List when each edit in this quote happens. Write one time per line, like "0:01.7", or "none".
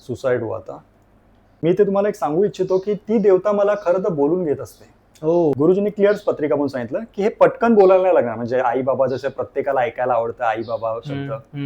0:01.5
0:05.6